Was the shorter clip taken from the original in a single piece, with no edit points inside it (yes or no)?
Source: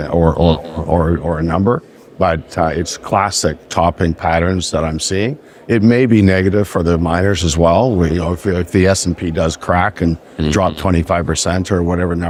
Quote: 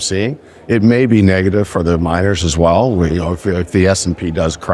yes